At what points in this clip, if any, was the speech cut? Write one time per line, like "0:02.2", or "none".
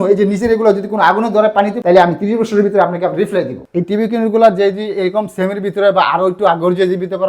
0:01.8
0:03.6